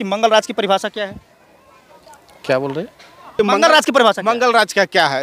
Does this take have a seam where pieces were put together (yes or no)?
yes